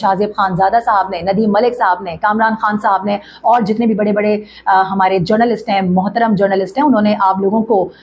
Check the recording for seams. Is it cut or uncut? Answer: uncut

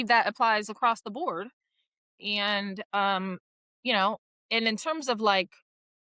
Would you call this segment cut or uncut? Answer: uncut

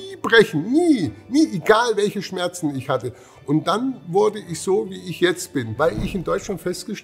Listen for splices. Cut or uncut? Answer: cut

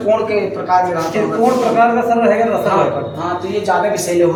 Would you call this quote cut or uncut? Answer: uncut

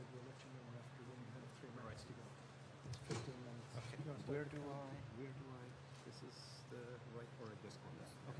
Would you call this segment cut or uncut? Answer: uncut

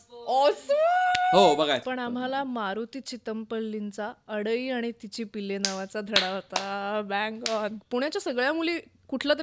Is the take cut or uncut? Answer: cut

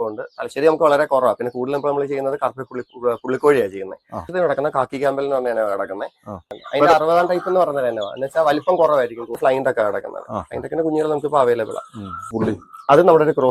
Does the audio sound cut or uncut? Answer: cut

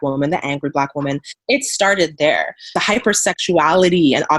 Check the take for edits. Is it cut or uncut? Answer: cut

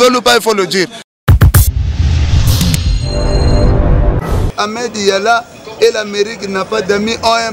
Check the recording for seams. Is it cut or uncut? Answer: cut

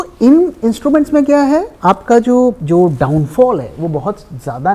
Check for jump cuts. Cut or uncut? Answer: cut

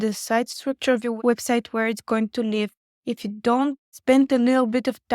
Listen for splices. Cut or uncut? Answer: cut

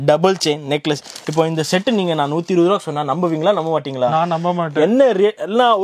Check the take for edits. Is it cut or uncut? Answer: uncut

